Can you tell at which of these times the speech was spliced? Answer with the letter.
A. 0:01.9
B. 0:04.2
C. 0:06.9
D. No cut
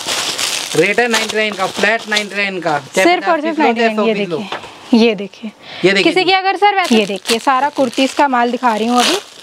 C